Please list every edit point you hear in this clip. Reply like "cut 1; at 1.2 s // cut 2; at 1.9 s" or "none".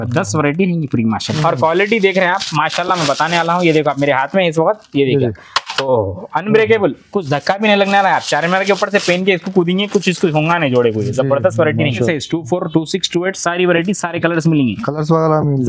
cut 1; at 1.3 s // cut 2; at 12.1 s